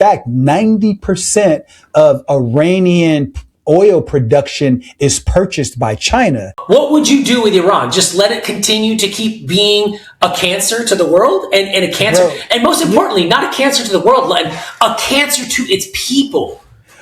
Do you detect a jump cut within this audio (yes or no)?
yes